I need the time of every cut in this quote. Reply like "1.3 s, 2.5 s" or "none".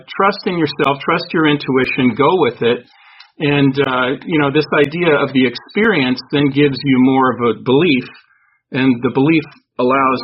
none